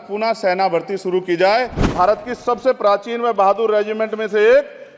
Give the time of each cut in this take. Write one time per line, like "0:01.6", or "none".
0:01.8